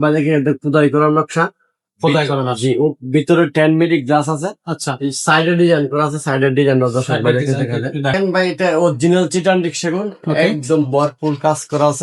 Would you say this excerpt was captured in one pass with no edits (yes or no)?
no